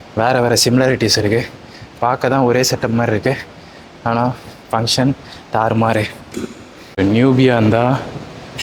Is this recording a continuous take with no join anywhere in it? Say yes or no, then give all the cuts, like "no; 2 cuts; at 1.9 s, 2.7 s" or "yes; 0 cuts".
yes; 0 cuts